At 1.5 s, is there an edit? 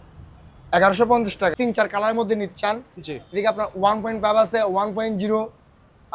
yes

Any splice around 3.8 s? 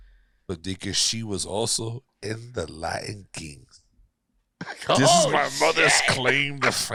no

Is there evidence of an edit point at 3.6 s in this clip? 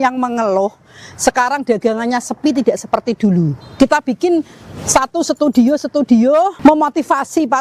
yes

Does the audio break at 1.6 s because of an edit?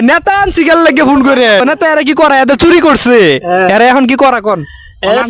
yes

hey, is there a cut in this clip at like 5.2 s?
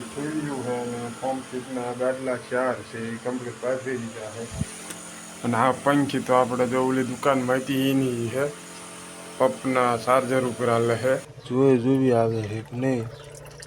no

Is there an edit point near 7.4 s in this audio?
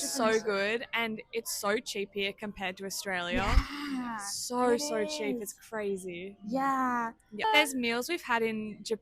yes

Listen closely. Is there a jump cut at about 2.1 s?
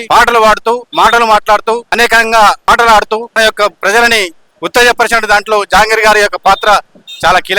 yes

